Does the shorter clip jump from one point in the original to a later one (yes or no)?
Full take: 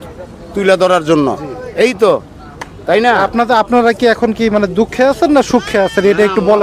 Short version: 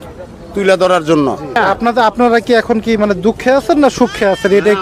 yes